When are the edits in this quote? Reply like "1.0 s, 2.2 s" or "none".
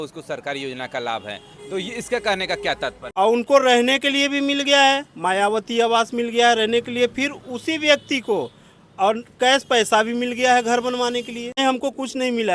3.0 s, 11.6 s